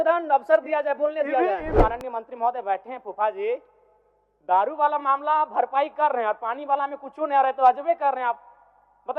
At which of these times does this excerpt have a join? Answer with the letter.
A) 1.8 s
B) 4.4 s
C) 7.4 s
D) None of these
A